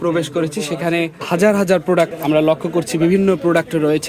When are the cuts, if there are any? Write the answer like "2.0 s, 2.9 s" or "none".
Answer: 1.2 s, 2.2 s